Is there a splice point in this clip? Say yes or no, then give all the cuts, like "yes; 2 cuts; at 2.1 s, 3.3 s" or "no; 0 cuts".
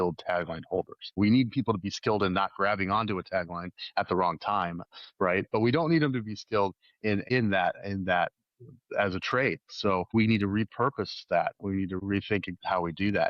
yes; 4 cuts; at 1.2 s, 7.3 s, 10.1 s, 12.0 s